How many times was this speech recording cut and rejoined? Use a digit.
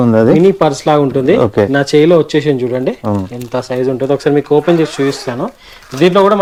0